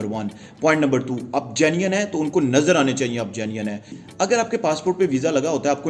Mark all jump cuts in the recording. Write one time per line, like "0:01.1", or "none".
0:04.0